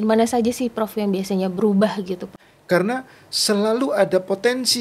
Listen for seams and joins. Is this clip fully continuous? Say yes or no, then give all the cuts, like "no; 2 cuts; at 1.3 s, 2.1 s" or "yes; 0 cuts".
no; 1 cut; at 2.3 s